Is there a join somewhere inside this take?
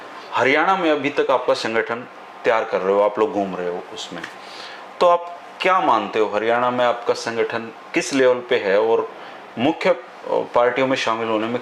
no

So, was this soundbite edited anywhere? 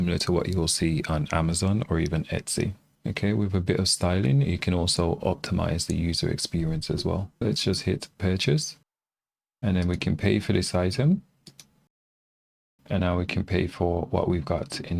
no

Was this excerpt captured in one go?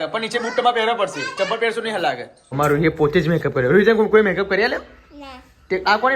no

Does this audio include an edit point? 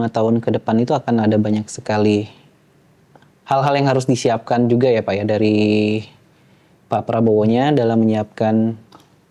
no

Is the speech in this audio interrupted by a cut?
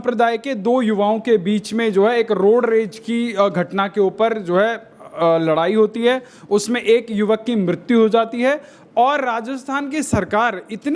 no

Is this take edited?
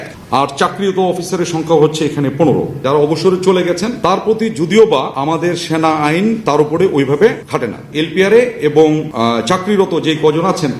yes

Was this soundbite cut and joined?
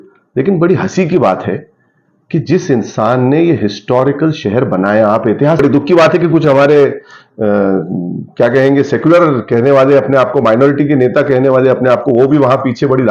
yes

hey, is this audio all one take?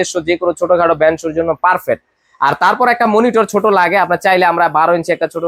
yes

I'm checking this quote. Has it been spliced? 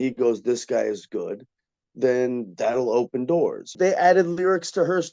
yes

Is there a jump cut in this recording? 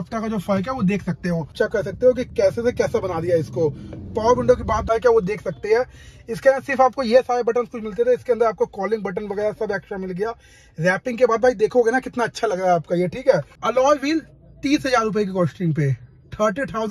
yes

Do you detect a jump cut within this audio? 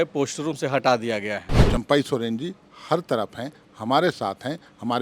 yes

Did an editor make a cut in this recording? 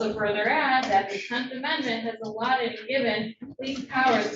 no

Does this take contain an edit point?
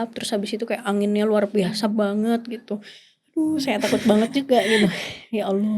no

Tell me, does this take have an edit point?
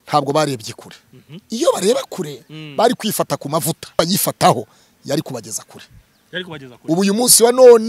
yes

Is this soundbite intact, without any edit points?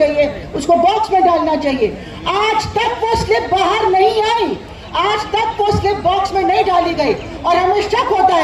yes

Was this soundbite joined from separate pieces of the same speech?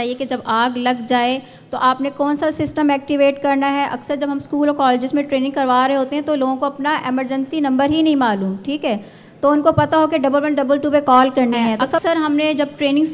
yes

